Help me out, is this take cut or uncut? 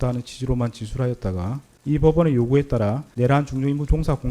cut